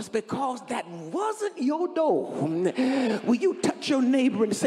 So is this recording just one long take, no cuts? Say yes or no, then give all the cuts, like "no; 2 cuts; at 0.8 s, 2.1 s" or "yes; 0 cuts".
yes; 0 cuts